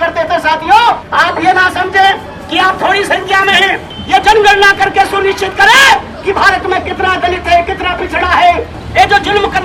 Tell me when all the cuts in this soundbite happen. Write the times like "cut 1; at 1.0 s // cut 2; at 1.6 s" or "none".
cut 1; at 1.1 s // cut 2; at 3.9 s // cut 3; at 8.8 s